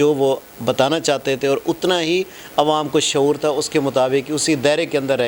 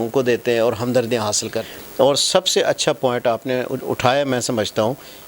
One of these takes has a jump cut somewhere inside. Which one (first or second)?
second